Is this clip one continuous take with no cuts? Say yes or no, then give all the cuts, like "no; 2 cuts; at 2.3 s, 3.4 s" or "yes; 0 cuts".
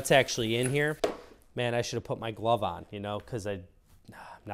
no; 1 cut; at 0.9 s